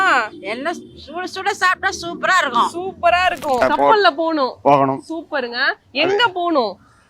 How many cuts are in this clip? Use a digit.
1